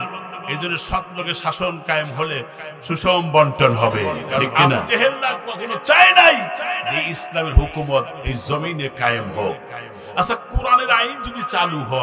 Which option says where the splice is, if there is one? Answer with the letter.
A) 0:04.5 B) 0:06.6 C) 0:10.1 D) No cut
A